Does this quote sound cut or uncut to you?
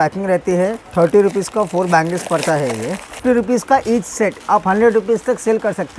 cut